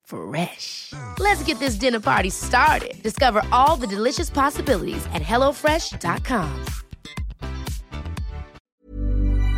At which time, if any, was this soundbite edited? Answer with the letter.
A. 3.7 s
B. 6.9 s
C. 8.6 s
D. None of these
C